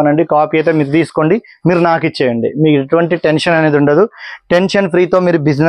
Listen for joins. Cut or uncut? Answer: uncut